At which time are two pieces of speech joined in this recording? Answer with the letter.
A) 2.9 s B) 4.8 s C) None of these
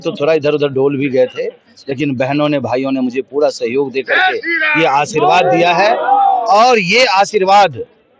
C